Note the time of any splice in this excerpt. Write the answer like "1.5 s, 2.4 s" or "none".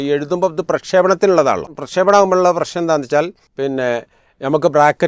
1.8 s, 3.4 s